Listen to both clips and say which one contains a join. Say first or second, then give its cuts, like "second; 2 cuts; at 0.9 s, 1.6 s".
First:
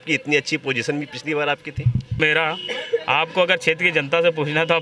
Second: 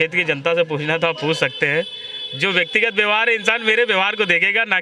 first; 1 cut; at 2.2 s